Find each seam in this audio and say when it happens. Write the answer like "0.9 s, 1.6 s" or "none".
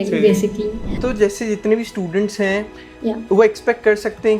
1.0 s